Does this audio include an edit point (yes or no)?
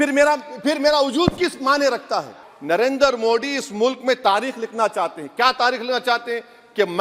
yes